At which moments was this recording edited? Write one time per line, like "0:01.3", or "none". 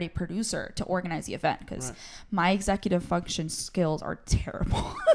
none